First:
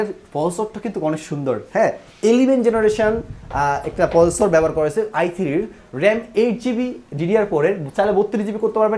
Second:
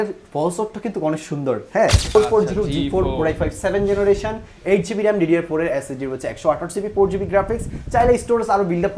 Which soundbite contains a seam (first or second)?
second